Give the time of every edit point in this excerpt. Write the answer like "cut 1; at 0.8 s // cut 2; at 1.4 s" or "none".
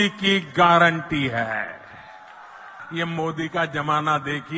cut 1; at 2.8 s